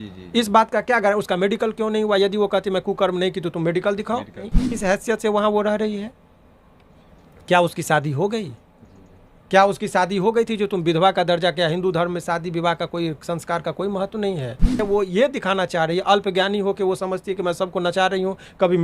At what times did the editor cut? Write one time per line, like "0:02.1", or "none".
0:04.6
0:14.8